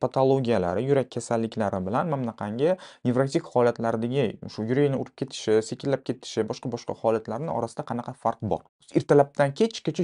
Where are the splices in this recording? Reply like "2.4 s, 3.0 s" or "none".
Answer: 8.8 s